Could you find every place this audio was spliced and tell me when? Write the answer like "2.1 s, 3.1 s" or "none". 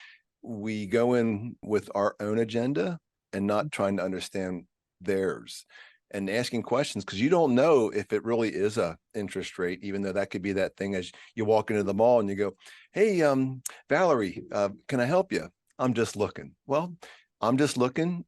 1.6 s